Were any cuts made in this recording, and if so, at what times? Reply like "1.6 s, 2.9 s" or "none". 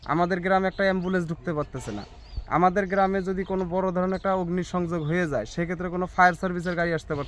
none